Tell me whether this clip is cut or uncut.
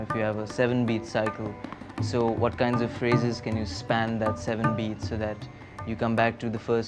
uncut